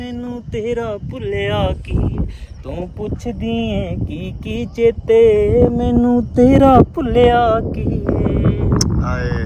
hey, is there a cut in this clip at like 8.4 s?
no; 0 cuts

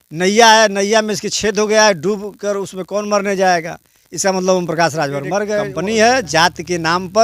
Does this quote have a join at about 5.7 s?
yes; 1 cut; at 5.7 s

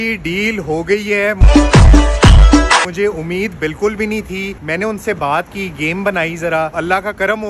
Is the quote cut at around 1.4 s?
no; 0 cuts

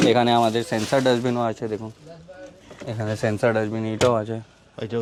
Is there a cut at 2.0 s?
no; 0 cuts

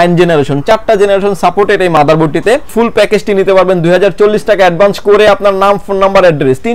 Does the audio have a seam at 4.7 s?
no; 1 cut; at 2.7 s

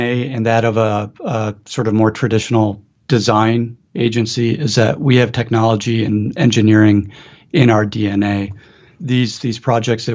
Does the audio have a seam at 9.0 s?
yes; 1 cut; at 9.0 s

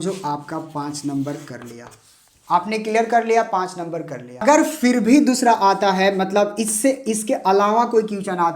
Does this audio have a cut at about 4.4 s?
yes; 1 cut; at 4.4 s

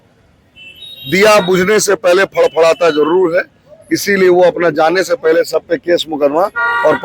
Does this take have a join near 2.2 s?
no; 0 cuts

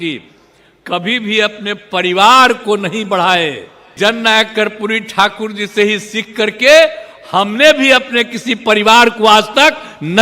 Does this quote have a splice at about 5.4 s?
no; 1 cut; at 3.9 s

